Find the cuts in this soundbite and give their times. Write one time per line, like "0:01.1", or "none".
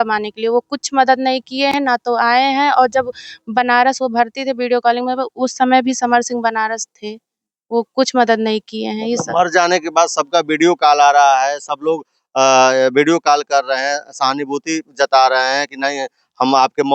none